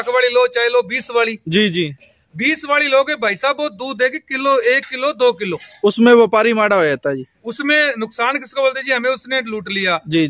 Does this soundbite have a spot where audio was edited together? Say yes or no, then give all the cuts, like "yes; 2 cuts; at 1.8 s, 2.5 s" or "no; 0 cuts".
no; 0 cuts